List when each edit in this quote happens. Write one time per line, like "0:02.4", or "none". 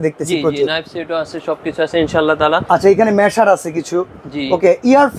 none

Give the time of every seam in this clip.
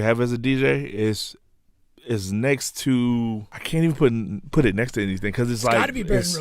0:03.5

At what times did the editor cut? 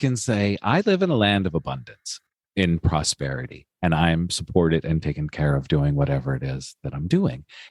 0:02.1

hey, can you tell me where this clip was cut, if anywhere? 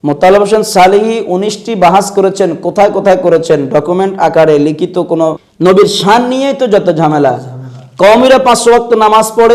0:05.5

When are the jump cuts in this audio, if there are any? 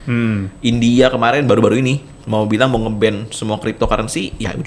none

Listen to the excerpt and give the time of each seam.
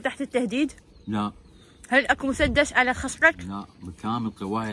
none

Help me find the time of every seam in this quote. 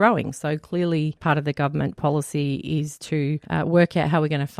0:01.2
0:03.4

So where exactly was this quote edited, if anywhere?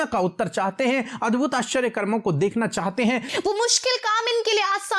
0:03.3

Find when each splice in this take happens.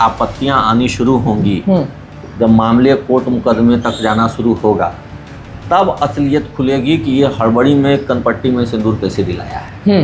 none

